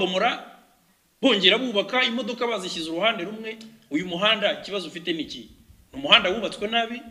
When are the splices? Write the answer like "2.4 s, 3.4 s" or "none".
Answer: none